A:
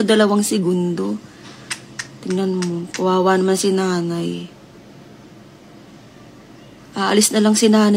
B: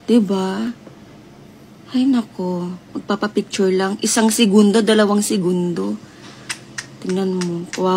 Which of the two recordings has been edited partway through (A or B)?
B